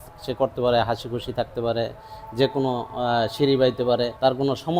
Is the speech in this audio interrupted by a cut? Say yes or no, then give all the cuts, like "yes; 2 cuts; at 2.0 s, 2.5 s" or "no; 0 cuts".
no; 0 cuts